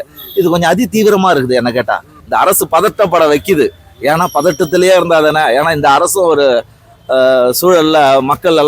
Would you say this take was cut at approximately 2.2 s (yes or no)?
yes